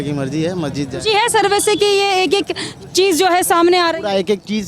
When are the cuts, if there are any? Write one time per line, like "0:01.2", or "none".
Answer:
none